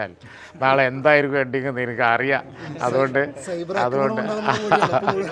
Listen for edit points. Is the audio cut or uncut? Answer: uncut